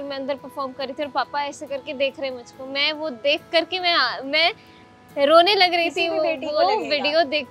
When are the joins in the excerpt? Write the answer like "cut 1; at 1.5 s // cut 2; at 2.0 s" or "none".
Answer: none